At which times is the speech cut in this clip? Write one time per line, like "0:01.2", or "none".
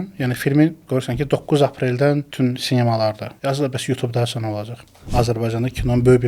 0:02.3
0:03.3
0:05.1